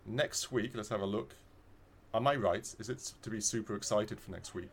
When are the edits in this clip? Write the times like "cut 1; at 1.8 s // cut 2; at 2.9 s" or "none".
none